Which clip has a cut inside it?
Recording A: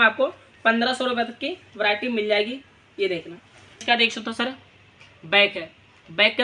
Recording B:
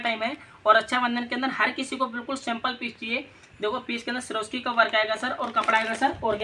A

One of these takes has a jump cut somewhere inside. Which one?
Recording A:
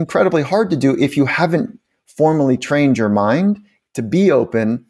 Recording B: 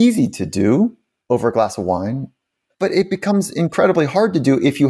B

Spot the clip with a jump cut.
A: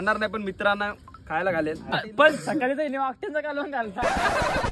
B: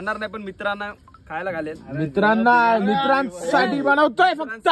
A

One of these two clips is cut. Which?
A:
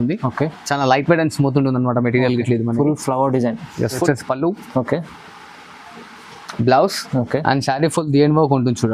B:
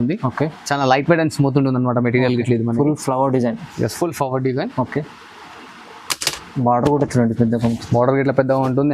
A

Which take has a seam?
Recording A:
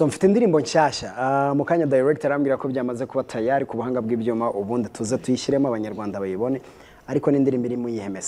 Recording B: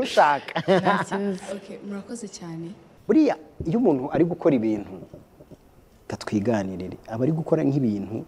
B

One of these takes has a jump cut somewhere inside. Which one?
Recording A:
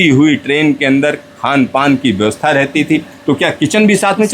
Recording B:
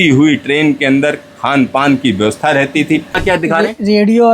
B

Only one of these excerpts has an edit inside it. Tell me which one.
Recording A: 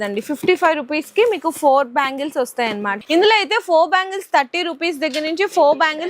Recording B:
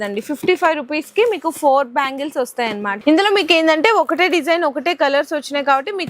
A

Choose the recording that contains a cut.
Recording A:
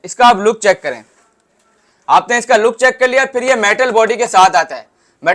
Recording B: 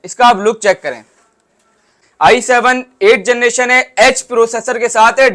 B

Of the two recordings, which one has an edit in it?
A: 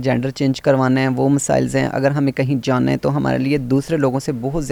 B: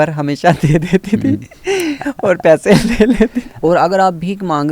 B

